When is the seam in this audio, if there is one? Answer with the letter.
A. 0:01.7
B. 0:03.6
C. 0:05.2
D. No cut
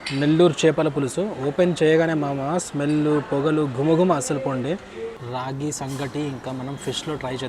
C